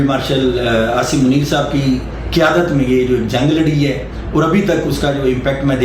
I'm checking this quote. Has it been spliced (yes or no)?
no